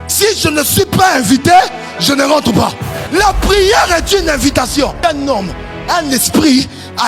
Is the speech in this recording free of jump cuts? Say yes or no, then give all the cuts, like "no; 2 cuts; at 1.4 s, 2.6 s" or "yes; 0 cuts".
no; 2 cuts; at 2.9 s, 5.0 s